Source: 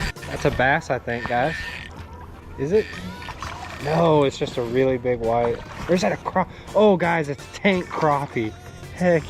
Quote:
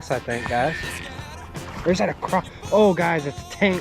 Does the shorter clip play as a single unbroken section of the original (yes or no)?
no